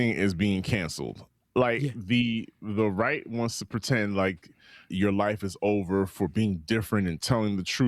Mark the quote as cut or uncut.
cut